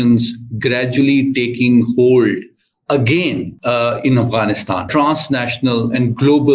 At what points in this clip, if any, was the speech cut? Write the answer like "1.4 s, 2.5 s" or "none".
3.5 s, 4.9 s